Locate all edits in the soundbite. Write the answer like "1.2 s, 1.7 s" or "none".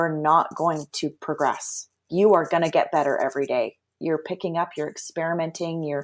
4.0 s